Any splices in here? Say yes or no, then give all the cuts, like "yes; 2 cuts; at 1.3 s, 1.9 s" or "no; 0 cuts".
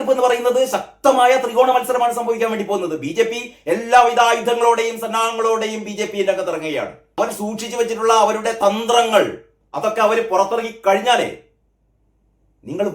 yes; 1 cut; at 7.2 s